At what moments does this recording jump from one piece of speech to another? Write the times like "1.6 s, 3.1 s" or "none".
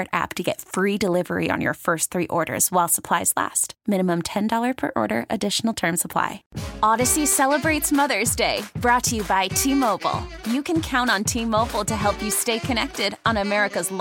6.4 s